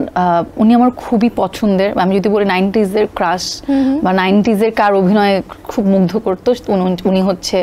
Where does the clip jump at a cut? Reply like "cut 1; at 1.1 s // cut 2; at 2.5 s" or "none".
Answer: none